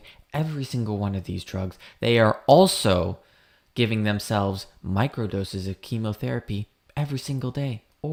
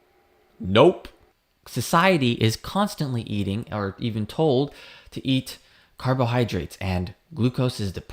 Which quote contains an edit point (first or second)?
second